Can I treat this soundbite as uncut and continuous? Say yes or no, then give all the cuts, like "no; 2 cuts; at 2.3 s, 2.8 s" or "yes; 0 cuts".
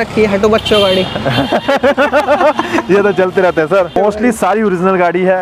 yes; 0 cuts